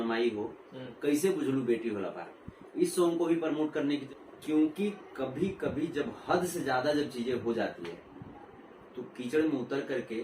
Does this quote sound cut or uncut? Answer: cut